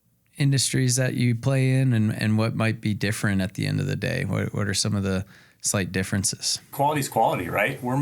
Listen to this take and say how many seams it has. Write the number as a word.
one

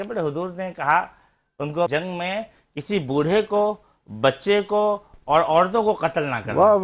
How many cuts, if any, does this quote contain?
one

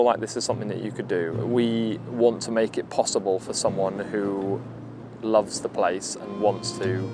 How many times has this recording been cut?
one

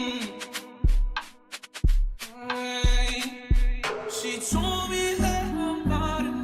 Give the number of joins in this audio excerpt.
one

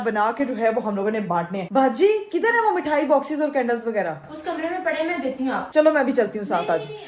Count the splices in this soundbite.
two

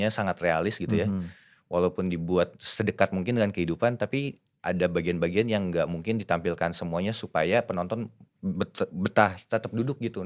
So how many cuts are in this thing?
zero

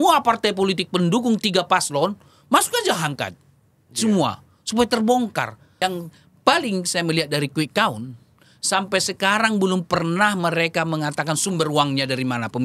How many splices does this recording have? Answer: one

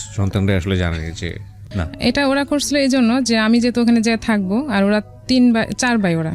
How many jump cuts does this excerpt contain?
one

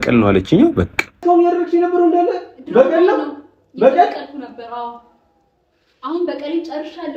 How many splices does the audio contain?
one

